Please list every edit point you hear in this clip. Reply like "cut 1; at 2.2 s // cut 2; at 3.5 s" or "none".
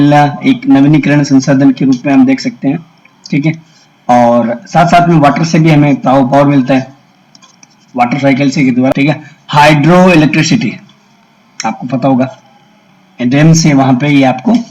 cut 1; at 8.9 s